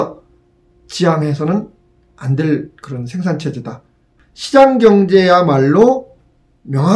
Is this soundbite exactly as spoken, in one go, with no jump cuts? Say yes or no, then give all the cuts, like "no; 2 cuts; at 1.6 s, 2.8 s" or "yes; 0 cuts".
yes; 0 cuts